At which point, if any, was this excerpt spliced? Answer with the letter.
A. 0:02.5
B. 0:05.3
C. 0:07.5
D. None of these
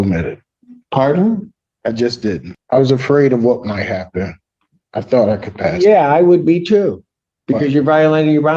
A